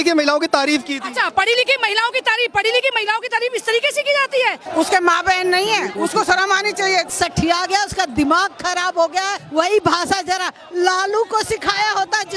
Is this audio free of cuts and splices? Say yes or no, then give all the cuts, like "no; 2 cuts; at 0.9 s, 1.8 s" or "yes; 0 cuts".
no; 3 cuts; at 4.6 s, 7.1 s, 9.4 s